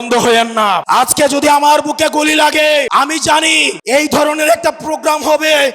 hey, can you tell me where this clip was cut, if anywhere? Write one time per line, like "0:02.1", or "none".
0:00.8
0:03.2